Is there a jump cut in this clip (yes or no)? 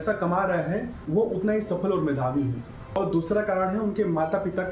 yes